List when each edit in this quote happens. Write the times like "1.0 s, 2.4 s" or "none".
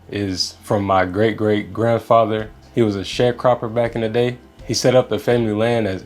2.6 s